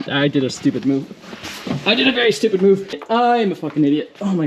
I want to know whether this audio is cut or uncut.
cut